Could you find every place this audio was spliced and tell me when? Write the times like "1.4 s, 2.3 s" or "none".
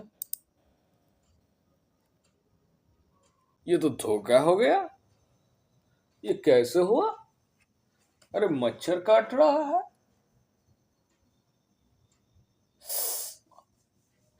3.5 s